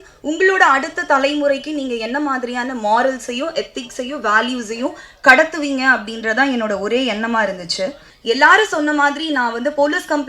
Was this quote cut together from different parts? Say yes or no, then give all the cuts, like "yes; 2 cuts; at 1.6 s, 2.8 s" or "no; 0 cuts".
yes; 1 cut; at 8.1 s